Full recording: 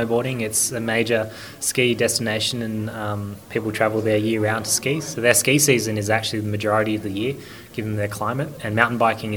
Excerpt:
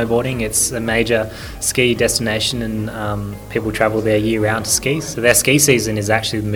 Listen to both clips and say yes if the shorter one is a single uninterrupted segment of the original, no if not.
yes